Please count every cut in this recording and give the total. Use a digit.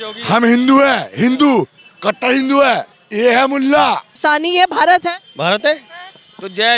2